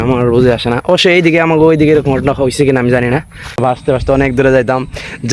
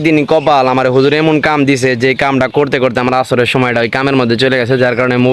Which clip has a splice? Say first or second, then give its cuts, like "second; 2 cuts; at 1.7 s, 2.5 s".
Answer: first; 1 cut; at 3.6 s